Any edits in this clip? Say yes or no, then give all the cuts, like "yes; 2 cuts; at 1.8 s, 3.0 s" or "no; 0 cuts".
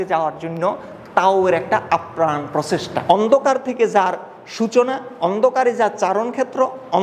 yes; 1 cut; at 3.0 s